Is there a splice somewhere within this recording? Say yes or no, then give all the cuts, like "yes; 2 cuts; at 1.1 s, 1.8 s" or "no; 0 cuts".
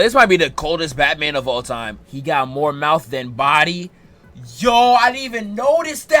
yes; 1 cut; at 1.9 s